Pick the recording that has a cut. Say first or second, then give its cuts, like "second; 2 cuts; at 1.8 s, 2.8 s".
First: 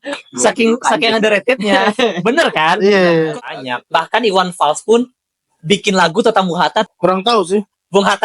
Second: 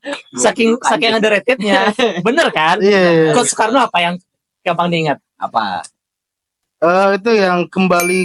first; 2 cuts; at 3.4 s, 6.9 s